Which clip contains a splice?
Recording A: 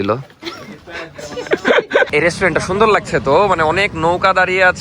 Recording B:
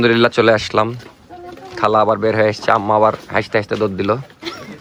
A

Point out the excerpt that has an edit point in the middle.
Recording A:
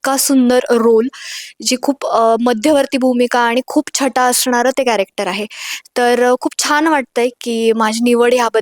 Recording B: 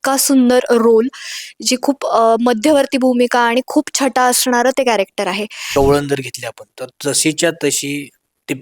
B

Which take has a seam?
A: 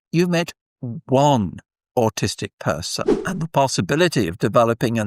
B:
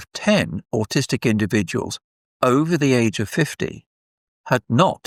A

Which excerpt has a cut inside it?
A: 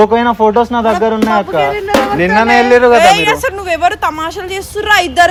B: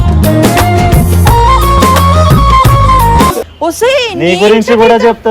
B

